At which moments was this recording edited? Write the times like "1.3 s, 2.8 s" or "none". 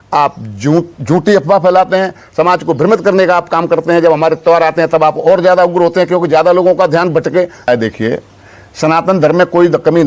7.7 s